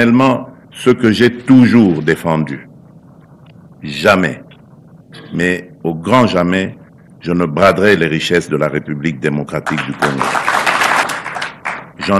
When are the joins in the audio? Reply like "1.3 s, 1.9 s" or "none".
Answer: 11.1 s